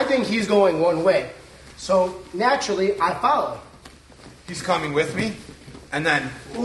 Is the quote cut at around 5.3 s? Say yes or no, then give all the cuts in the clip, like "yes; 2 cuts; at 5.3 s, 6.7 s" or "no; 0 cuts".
no; 0 cuts